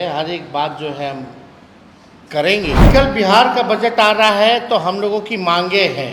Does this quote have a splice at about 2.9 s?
yes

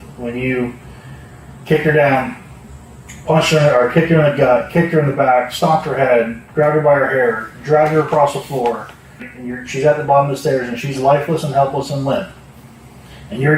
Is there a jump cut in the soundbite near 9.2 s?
yes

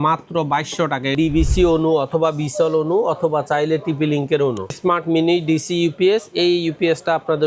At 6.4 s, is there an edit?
no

